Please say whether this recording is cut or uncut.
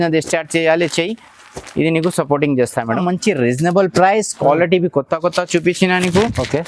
cut